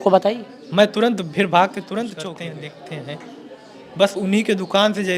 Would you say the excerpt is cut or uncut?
cut